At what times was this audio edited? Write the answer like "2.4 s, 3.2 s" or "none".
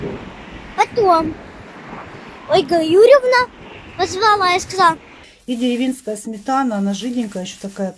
5.1 s